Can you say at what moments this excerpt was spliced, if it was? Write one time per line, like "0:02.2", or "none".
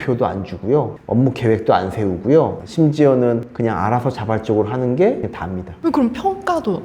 none